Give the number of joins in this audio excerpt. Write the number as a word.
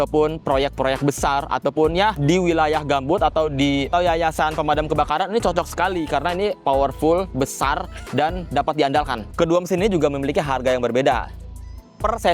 one